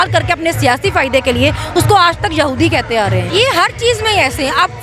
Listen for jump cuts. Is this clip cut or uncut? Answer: cut